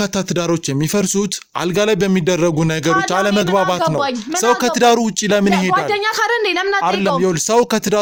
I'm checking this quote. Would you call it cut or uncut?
uncut